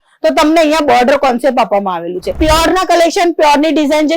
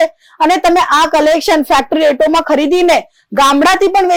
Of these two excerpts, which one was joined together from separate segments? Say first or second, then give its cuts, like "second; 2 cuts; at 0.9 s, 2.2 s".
first; 1 cut; at 2.4 s